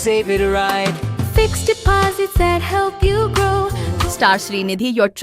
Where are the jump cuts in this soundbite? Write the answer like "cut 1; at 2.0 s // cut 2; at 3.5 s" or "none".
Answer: cut 1; at 3.9 s